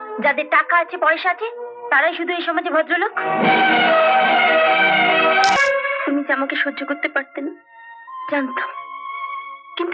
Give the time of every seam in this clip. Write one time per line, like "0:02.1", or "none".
0:05.6